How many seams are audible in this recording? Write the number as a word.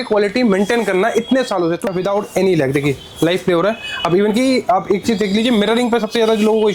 one